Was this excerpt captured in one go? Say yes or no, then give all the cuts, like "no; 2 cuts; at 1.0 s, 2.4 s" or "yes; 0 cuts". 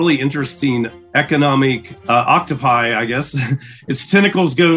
no; 2 cuts; at 0.9 s, 1.9 s